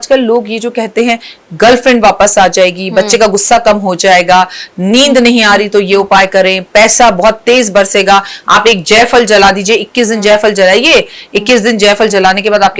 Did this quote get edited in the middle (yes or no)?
no